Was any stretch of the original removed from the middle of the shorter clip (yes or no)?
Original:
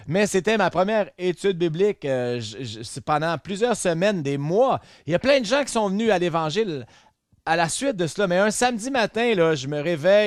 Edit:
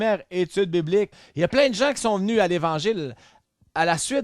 yes